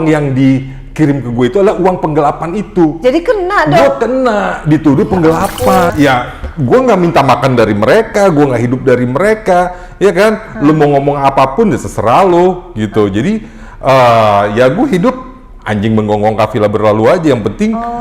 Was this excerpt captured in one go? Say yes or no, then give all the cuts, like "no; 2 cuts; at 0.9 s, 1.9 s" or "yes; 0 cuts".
no; 1 cut; at 5.9 s